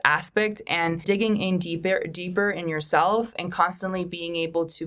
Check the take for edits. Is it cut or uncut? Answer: cut